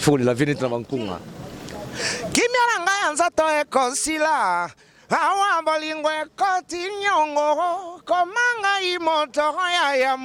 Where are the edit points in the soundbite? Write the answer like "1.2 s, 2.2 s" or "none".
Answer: none